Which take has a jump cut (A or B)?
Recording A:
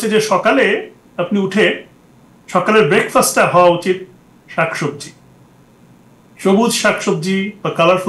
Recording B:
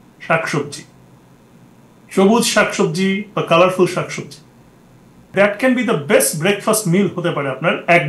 B